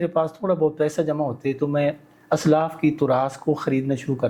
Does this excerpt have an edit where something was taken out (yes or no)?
no